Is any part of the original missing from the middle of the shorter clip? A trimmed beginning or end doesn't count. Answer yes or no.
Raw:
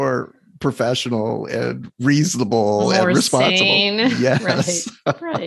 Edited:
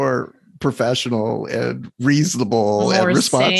no